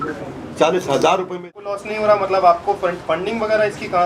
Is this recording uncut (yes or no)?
no